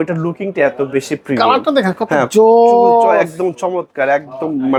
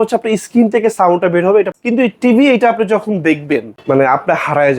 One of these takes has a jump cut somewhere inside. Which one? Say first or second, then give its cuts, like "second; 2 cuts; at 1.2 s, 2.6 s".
second; 2 cuts; at 1.7 s, 3.7 s